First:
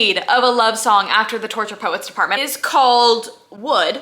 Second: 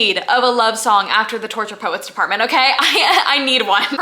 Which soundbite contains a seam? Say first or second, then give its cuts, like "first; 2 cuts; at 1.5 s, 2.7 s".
first; 1 cut; at 2.4 s